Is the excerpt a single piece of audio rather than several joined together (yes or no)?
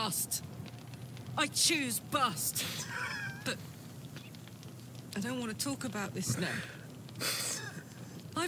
yes